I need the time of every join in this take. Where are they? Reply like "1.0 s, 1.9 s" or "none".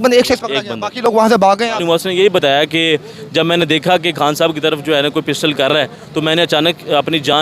1.8 s